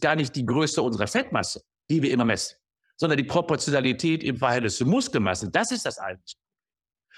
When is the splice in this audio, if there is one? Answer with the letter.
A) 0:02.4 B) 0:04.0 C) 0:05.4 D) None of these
D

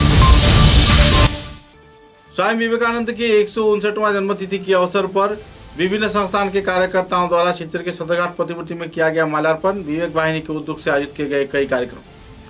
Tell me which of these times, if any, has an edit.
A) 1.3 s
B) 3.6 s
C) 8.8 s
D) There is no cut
D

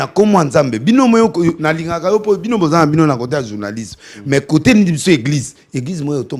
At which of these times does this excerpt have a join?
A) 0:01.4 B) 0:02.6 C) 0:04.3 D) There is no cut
D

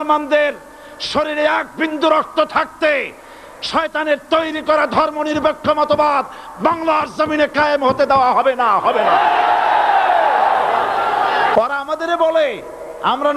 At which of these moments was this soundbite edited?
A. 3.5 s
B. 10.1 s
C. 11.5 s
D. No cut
C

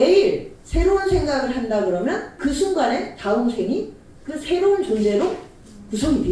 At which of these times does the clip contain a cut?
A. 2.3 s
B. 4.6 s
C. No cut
A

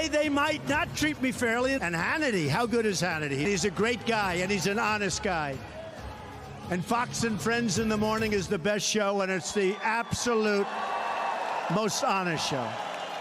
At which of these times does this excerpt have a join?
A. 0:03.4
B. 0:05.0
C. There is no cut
A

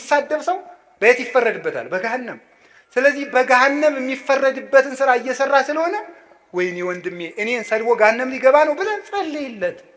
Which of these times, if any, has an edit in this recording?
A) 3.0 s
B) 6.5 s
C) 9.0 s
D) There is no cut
D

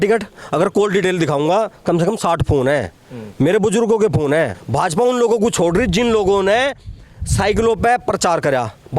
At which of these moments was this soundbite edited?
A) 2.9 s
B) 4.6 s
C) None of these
B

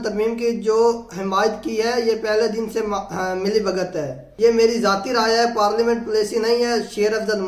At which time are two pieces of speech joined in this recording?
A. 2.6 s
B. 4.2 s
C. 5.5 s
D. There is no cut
D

